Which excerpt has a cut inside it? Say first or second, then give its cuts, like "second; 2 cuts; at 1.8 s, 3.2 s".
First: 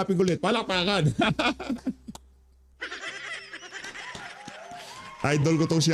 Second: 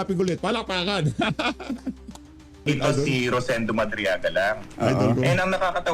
second; 1 cut; at 2.7 s